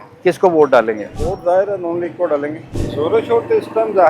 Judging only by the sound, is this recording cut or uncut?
cut